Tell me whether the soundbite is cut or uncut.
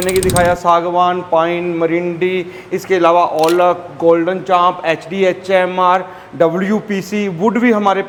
uncut